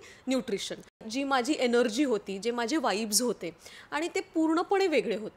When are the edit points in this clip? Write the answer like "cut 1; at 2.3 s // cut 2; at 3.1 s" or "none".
cut 1; at 1.0 s